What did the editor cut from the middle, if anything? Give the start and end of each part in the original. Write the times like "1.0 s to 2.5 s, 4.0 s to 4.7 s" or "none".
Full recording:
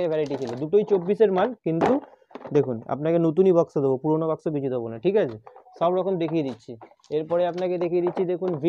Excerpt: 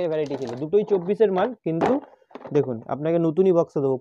none